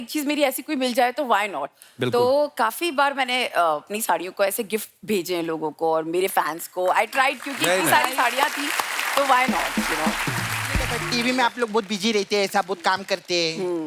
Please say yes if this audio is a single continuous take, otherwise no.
no